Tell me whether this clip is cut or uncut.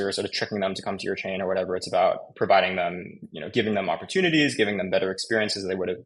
uncut